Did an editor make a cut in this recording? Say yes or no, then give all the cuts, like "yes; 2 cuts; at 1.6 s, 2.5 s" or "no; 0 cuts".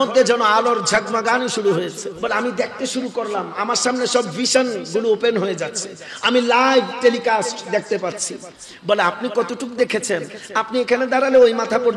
yes; 1 cut; at 2.1 s